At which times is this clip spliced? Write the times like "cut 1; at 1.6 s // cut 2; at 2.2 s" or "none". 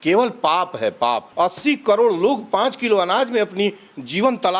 cut 1; at 1.3 s